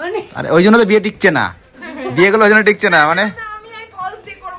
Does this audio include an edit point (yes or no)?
no